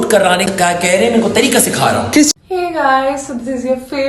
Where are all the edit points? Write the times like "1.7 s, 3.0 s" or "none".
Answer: 2.3 s

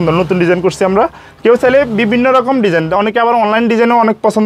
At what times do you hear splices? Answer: none

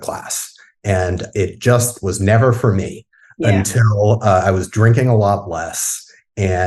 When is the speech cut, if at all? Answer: none

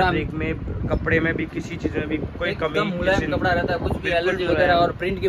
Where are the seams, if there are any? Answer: none

